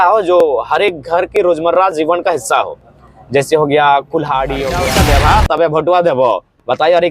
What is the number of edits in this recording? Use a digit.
1